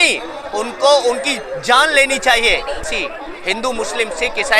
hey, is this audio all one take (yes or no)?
yes